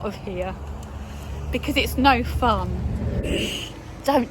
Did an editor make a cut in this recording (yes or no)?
yes